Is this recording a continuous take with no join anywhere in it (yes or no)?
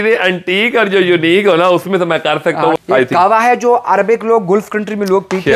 no